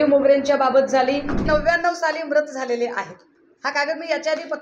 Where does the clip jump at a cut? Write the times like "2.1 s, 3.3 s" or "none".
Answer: 1.5 s